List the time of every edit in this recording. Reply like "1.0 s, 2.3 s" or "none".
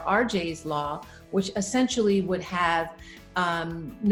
none